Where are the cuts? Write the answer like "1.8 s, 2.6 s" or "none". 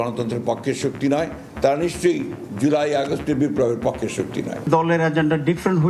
4.6 s

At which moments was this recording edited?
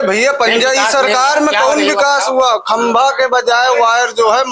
none

